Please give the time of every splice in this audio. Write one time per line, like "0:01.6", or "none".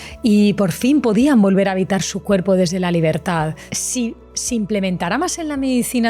0:04.0

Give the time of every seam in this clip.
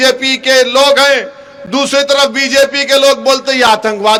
none

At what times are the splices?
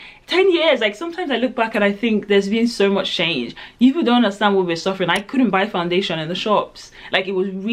none

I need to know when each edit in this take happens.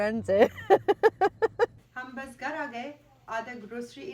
0:01.7

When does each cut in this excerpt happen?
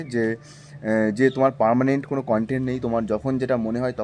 none

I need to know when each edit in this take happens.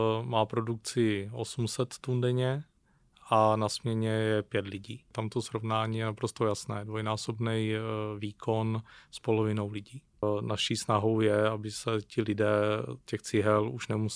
0:05.1
0:10.2

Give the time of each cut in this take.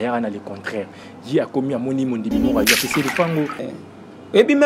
0:03.7

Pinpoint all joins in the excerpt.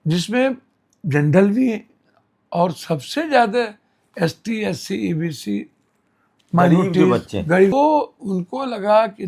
none

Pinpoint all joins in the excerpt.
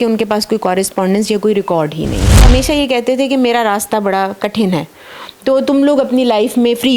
0:02.4

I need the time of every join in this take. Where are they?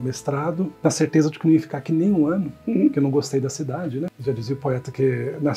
none

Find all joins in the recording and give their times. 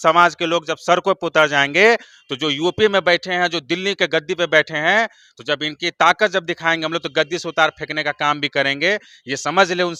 none

